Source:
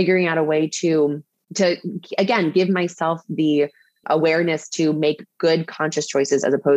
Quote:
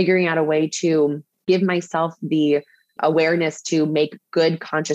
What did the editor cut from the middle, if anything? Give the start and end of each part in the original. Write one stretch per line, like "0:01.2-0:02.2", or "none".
0:01.4-0:02.5

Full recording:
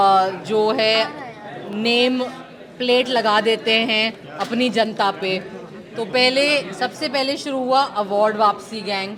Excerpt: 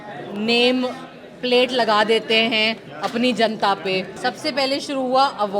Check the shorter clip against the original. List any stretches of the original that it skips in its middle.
0:05.5-0:06.7

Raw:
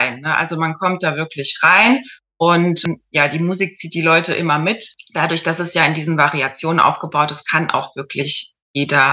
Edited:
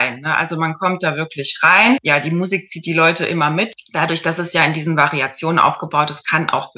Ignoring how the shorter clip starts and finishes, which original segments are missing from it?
0:02.0-0:03.1
0:04.9-0:05.0

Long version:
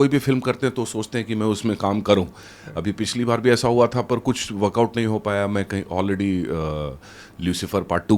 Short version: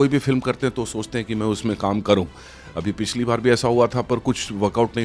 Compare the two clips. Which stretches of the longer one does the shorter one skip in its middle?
none

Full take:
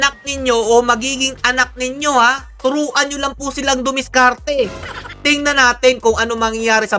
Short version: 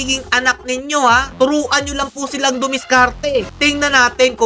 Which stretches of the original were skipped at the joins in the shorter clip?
0:02.4-0:02.5
0:04.8-0:05.2

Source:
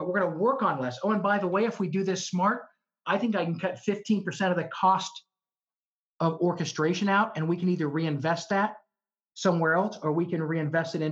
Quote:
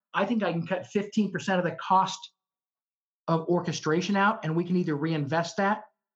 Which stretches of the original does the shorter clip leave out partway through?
none

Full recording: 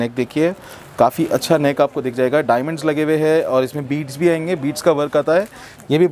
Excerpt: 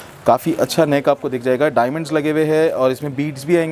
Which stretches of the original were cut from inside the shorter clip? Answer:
none

